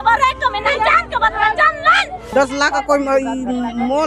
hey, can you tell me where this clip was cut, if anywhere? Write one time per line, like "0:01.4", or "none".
0:02.3